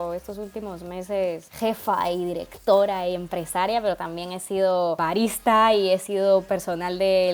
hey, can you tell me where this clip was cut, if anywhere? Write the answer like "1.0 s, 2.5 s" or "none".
1.5 s, 5.0 s